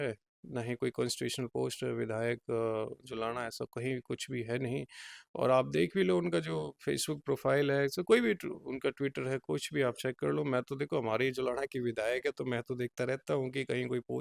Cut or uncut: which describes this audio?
uncut